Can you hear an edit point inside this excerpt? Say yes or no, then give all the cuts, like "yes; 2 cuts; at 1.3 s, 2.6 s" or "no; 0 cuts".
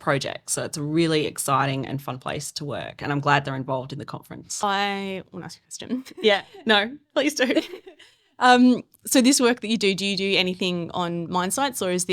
yes; 1 cut; at 4.6 s